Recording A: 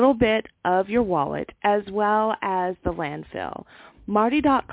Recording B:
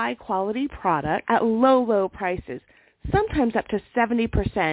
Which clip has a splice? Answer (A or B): B